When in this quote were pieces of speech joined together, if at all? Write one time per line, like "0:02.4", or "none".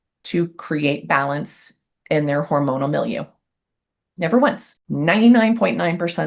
0:04.8